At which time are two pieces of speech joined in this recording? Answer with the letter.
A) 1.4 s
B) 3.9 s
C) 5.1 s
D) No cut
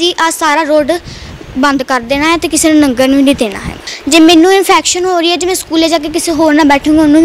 B